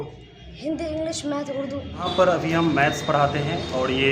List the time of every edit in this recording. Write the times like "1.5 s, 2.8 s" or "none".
2.1 s

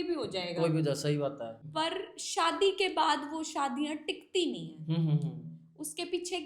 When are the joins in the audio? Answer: 1.6 s

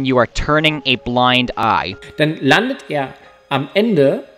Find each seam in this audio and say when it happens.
1.6 s

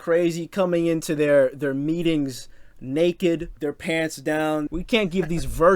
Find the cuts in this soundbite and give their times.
3.5 s, 4.7 s

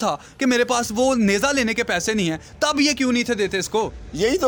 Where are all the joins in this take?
none

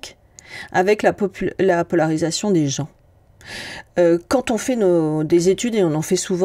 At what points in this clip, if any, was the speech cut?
none

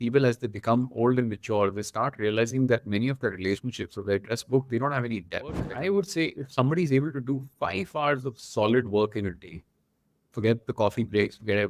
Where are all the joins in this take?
5.7 s

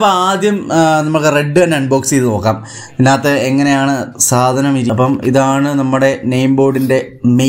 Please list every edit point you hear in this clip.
4.9 s

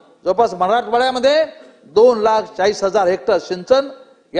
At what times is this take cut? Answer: none

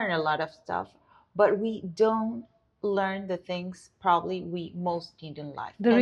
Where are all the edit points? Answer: none

